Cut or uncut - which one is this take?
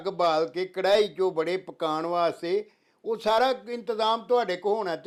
uncut